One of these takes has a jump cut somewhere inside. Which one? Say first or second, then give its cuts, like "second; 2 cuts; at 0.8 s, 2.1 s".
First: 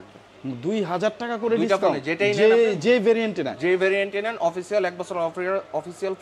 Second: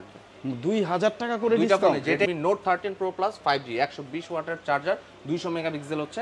second; 1 cut; at 2.3 s